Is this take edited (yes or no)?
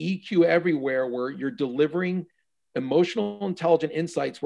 no